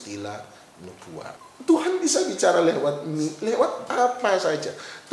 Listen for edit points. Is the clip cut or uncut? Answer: cut